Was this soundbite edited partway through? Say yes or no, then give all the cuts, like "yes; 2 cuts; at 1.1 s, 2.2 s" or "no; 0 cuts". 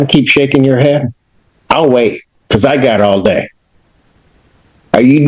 no; 0 cuts